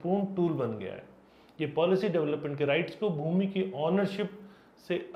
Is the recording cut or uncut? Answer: uncut